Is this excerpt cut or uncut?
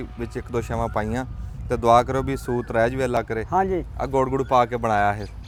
uncut